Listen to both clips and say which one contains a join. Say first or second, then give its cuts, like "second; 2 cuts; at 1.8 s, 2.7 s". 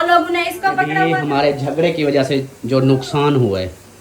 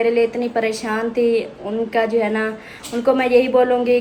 first; 1 cut; at 0.9 s